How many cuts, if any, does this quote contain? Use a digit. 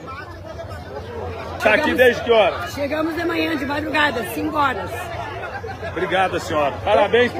0